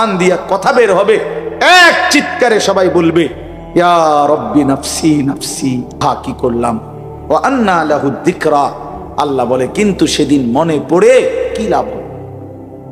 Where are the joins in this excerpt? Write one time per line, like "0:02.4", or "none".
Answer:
0:06.0